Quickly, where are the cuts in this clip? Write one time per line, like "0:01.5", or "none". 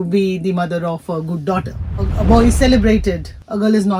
0:02.1